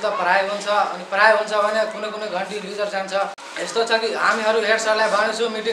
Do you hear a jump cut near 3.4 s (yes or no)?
yes